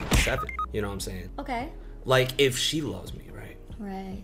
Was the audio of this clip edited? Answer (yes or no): no